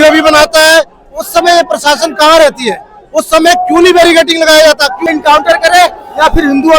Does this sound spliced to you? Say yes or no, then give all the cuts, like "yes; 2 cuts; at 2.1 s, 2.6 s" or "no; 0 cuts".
yes; 1 cut; at 5.1 s